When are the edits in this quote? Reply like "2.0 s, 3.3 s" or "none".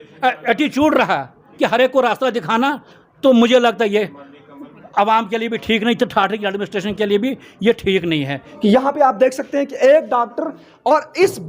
8.5 s